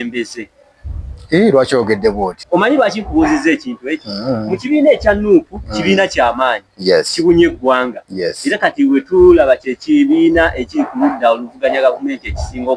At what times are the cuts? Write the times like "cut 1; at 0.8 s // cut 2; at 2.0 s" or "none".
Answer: cut 1; at 2.3 s